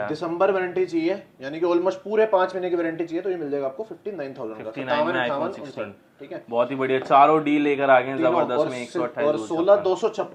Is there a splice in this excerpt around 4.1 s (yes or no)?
no